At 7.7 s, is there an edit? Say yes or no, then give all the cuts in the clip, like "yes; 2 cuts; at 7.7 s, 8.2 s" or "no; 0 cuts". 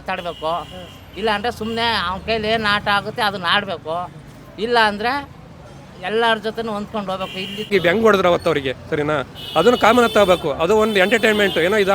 yes; 1 cut; at 7.7 s